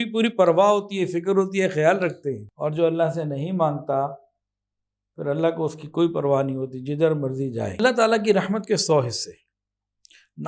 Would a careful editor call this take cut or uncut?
cut